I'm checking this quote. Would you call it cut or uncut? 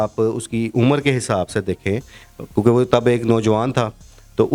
uncut